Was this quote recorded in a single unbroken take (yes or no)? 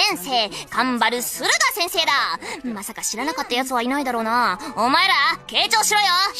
yes